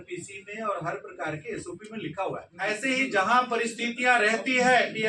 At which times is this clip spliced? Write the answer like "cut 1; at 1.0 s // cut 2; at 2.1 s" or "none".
cut 1; at 2.5 s